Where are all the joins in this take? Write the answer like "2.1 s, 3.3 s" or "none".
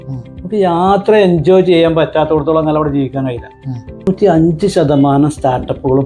4.1 s